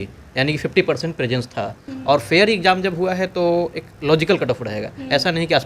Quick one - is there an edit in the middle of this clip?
yes; 1 cut; at 1.8 s

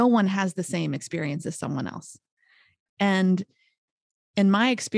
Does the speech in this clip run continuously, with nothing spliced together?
no; 1 cut; at 2.6 s

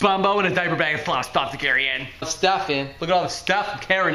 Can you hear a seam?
yes; 1 cut; at 2.3 s

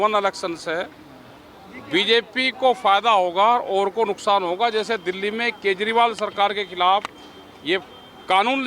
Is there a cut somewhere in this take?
no; 0 cuts

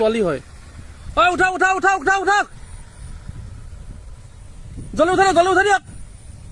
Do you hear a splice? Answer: no; 0 cuts

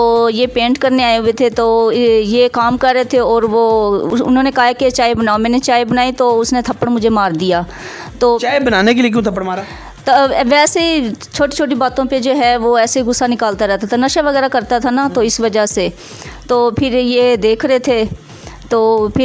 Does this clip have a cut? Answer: no; 0 cuts

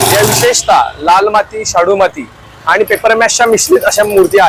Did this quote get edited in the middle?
no; 0 cuts

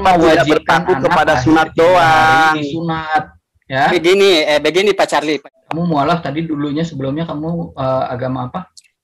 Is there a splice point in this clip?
yes; 1 cut; at 5.5 s

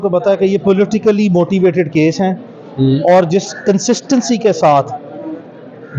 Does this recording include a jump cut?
no; 0 cuts

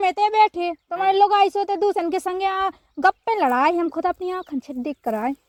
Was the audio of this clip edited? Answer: no; 0 cuts

